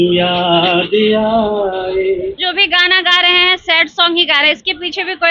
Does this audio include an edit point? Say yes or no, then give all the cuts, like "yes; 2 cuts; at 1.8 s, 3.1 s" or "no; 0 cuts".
yes; 1 cut; at 2.5 s